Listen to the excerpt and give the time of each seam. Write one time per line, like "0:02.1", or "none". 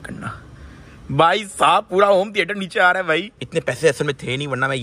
0:03.3